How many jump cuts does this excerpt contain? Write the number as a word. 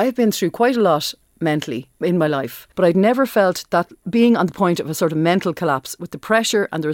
three